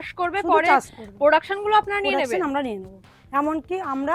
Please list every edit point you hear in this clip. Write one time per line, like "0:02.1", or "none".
0:02.9